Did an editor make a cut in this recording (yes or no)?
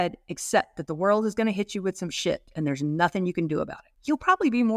yes